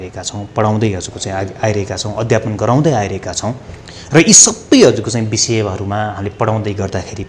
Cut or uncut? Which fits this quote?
uncut